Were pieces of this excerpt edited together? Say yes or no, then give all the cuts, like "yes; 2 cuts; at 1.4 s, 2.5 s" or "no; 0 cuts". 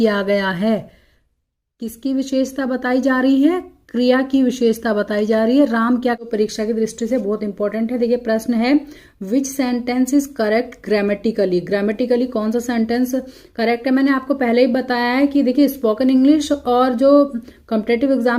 yes; 1 cut; at 6.3 s